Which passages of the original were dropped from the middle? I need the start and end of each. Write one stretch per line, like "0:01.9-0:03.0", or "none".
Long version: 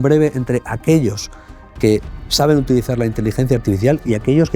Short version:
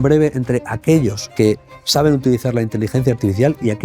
0:01.2-0:01.7